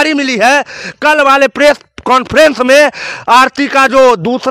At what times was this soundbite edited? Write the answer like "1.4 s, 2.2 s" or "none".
none